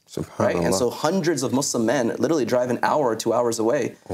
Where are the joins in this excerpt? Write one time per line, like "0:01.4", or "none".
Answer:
none